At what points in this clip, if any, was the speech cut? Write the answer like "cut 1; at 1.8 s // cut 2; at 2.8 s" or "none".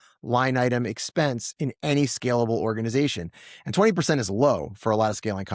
none